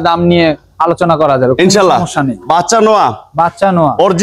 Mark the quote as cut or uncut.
uncut